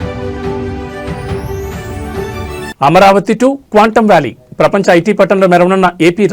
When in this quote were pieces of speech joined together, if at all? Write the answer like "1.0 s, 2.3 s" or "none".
2.1 s